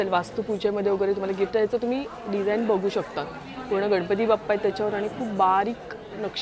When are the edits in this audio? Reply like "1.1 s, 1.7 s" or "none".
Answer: none